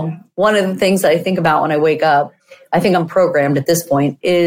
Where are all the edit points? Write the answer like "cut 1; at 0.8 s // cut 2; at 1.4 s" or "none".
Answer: none